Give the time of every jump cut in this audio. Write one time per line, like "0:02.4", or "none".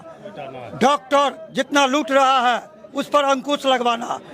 none

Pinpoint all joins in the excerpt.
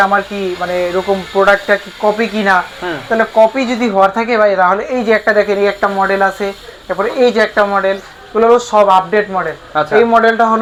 none

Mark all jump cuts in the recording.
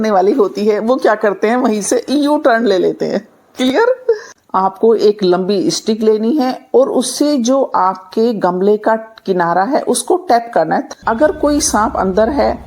0:04.3
0:10.9

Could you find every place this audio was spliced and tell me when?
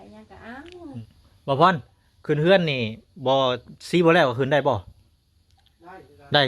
0:01.1

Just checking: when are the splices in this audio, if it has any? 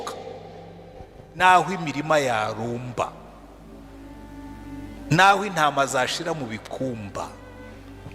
0:01.4

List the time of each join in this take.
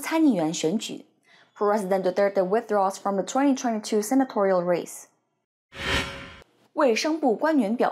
0:06.3

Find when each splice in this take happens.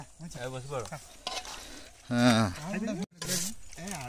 0:03.2

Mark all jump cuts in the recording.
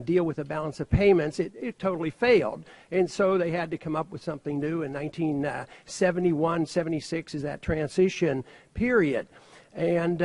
0:01.6

